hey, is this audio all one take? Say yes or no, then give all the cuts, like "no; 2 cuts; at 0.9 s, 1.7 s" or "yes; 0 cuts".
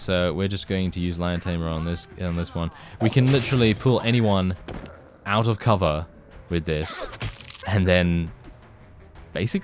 yes; 0 cuts